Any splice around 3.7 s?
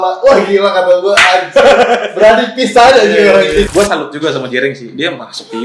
yes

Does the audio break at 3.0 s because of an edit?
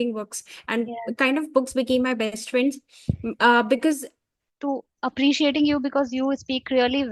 no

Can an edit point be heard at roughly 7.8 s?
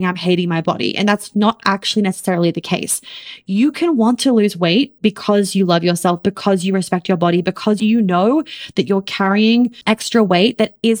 yes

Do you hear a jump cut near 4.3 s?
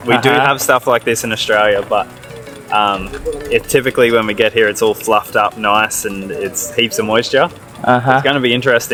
no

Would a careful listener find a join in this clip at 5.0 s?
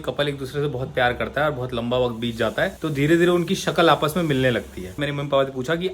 yes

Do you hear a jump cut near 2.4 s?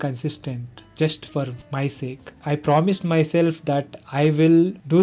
yes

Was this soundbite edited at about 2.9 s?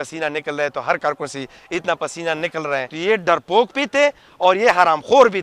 yes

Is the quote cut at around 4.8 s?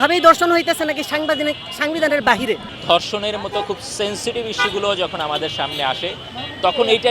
no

